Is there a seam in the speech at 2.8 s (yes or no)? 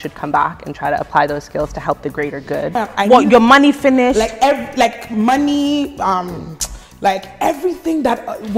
yes